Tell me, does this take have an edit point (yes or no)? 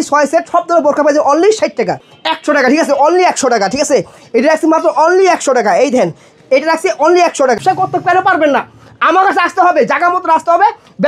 yes